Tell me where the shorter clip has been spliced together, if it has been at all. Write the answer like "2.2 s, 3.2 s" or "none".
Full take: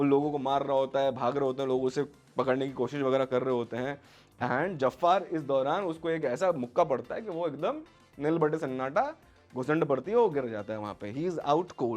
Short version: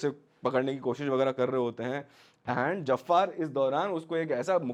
none

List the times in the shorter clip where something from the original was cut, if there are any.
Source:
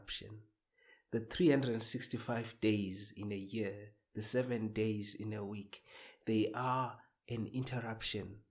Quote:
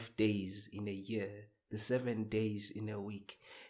none

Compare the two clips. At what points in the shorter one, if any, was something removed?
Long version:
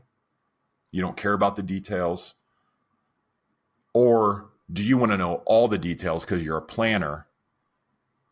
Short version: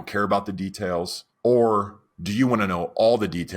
1.2 s

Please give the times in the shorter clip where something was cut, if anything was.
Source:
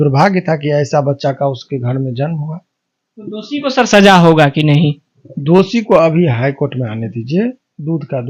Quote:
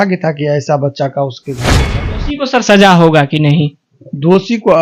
1.8 s

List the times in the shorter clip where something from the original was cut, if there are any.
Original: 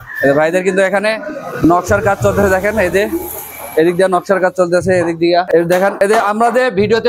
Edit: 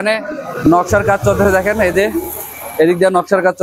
none

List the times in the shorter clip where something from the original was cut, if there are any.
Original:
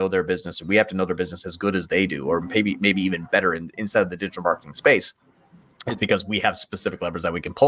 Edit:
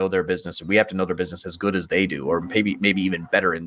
none

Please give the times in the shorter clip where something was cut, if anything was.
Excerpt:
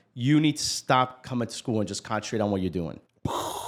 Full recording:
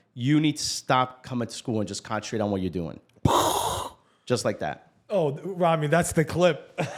none

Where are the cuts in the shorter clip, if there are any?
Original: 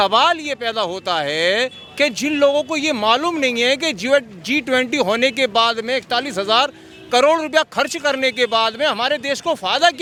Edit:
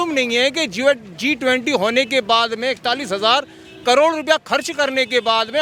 none

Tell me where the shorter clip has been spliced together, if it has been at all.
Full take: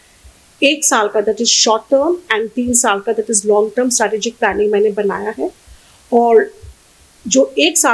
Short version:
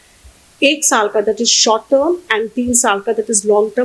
none

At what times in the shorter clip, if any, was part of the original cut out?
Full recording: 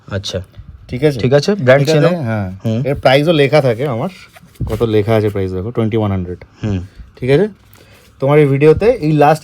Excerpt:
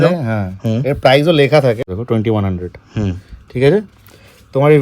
1.8 s

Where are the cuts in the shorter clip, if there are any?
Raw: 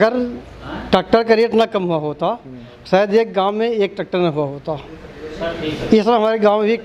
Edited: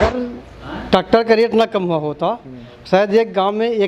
none

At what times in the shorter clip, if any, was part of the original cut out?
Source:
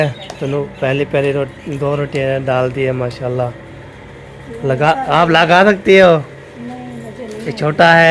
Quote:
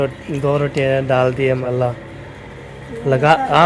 1.6 s

